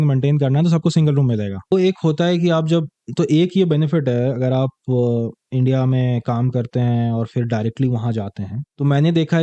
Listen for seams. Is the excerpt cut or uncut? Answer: cut